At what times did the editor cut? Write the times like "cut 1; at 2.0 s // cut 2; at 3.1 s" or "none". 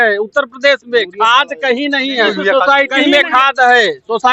cut 1; at 2.3 s

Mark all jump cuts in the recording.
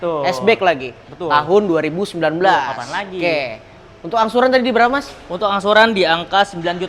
none

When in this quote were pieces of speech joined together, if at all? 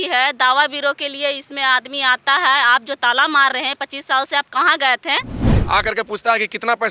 cut 1; at 5.5 s

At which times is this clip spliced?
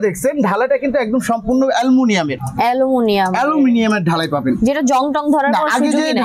none

